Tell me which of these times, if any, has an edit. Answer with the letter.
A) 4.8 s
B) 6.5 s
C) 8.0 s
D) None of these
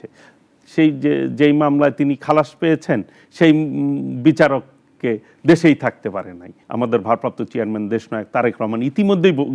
B